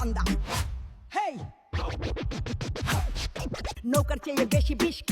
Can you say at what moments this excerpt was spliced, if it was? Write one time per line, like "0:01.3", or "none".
0:03.7